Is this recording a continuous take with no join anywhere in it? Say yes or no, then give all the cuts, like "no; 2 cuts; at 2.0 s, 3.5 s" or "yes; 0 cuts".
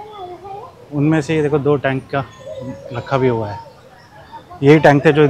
yes; 0 cuts